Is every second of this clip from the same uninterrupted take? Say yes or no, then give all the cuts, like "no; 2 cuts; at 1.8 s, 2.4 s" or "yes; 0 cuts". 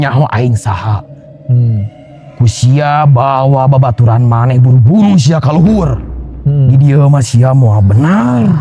yes; 0 cuts